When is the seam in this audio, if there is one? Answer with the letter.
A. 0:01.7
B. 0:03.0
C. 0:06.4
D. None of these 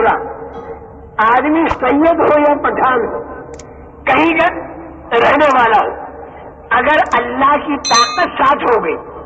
A